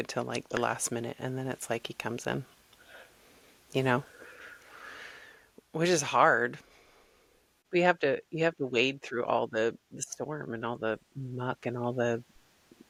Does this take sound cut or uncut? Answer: uncut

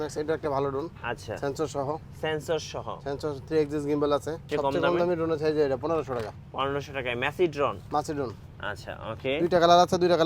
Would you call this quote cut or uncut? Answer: cut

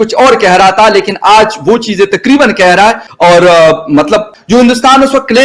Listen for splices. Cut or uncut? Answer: cut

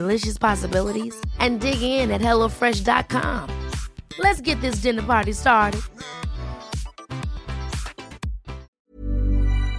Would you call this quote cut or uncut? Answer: cut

